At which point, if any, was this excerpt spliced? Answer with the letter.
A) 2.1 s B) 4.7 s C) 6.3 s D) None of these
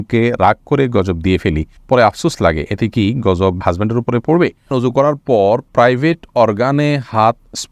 B